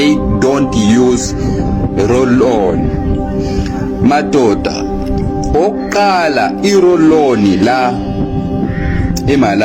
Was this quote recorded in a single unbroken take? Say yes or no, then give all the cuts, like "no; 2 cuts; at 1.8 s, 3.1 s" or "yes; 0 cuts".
yes; 0 cuts